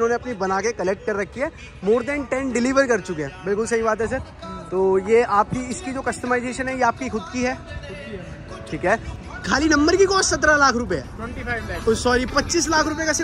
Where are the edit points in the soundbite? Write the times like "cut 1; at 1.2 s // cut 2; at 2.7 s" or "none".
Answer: cut 1; at 9.2 s

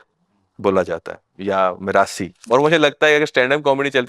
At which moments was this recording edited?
cut 1; at 2.4 s

